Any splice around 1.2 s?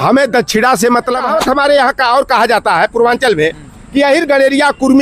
yes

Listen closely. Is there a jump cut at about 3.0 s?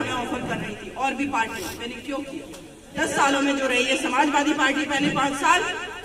yes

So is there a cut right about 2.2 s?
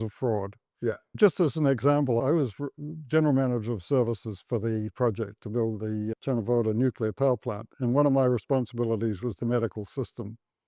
yes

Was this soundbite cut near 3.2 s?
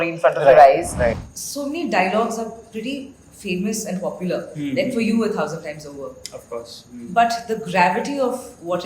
no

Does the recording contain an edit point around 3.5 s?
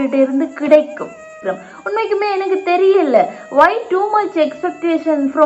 no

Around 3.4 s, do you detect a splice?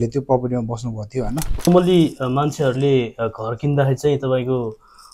no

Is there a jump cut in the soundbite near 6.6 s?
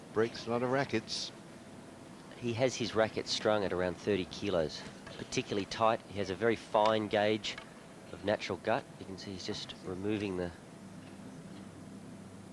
no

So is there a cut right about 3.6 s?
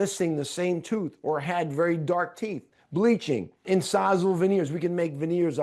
yes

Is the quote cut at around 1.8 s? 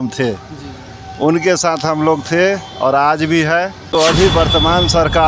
no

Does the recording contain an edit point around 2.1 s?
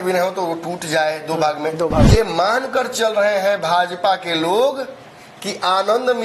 yes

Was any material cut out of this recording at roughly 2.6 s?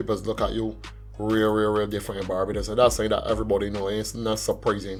no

